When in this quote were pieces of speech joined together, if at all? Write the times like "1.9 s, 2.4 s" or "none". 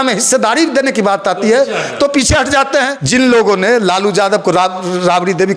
3.0 s